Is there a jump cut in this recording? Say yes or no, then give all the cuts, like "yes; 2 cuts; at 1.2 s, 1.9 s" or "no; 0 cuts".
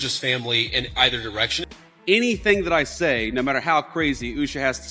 yes; 1 cut; at 1.7 s